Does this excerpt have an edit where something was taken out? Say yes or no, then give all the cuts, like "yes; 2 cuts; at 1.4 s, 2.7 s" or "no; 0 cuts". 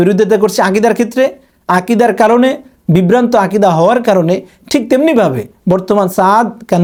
no; 0 cuts